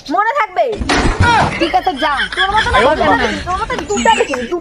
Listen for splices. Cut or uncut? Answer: uncut